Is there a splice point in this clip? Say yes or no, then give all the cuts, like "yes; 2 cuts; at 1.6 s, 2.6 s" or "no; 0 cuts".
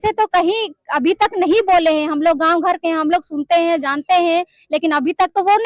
no; 0 cuts